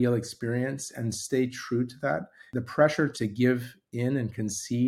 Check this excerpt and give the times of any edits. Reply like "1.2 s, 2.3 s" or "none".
2.4 s, 3.1 s